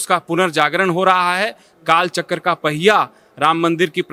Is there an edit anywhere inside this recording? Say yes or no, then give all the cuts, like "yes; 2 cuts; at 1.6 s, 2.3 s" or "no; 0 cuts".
no; 0 cuts